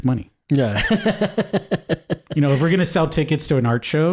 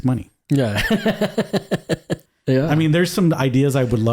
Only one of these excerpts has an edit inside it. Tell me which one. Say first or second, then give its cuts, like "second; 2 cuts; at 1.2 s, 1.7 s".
second; 1 cut; at 2.2 s